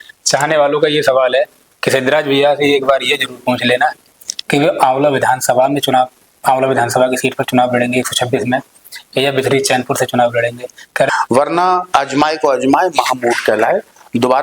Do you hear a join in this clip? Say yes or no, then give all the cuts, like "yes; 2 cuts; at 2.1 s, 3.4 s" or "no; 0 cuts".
yes; 1 cut; at 11.1 s